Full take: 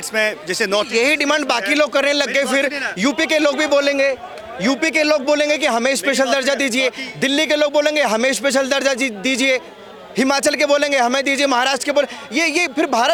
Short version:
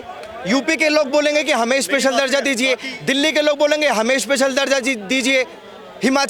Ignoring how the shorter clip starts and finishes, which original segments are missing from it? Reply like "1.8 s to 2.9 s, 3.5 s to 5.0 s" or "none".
none